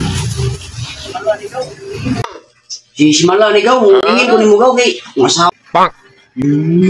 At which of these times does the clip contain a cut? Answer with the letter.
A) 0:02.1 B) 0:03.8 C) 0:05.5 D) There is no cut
C